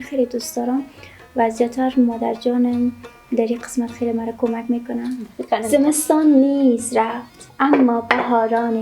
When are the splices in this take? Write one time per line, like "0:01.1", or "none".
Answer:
0:05.6